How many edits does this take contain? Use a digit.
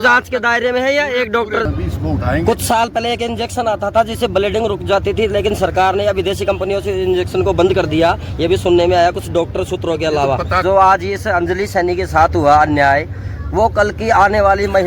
2